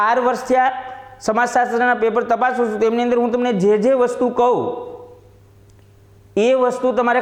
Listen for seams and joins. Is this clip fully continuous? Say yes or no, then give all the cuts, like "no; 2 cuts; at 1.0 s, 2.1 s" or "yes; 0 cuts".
yes; 0 cuts